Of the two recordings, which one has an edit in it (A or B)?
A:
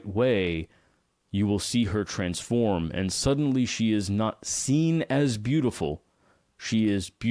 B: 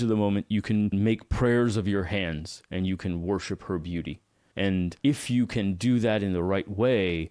B